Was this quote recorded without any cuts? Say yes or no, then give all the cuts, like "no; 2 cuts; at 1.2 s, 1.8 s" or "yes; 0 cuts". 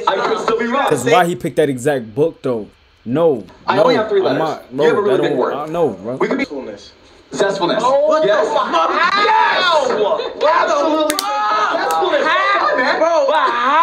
no; 1 cut; at 6.4 s